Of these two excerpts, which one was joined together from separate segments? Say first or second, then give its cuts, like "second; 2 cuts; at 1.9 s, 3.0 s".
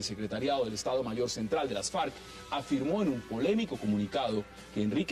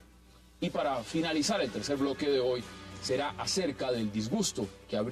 second; 1 cut; at 2.0 s